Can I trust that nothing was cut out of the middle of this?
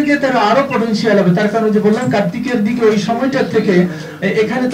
yes; 0 cuts

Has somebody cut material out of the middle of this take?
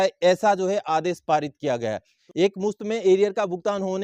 yes; 1 cut; at 2.1 s

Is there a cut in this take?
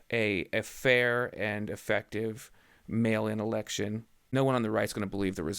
yes; 1 cut; at 4.3 s

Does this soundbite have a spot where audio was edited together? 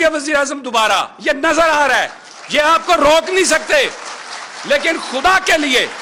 no; 0 cuts

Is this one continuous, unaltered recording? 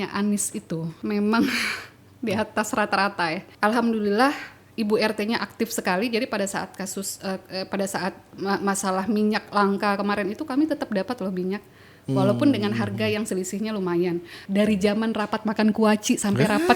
no; 3 cuts; at 0.9 s, 3.5 s, 14.4 s

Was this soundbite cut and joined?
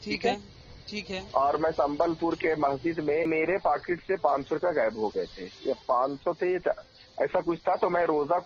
yes; 1 cut; at 3.3 s

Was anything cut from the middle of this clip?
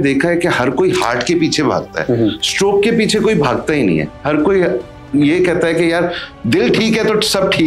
no; 0 cuts

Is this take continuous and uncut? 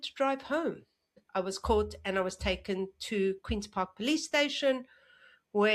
no; 1 cut; at 1.2 s

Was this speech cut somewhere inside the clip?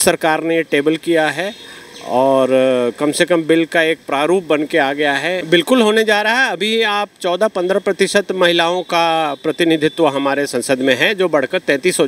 yes; 1 cut; at 5.4 s

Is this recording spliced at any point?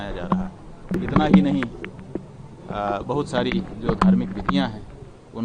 yes; 1 cut; at 0.9 s

